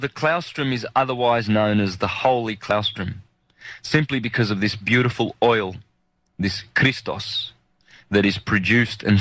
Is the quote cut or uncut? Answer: uncut